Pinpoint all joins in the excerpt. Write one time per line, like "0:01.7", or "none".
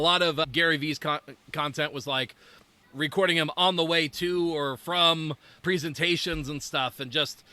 0:02.7